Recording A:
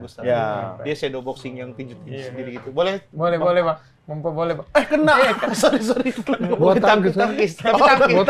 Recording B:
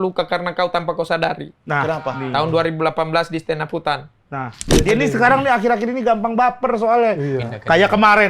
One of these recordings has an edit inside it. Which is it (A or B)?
B